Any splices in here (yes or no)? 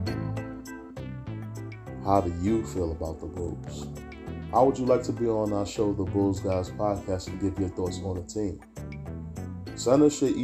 no